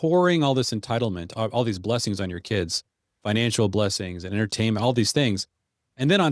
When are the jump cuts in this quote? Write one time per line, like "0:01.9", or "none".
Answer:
0:01.3